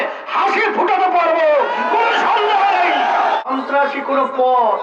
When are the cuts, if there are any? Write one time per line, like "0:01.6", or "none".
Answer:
0:03.4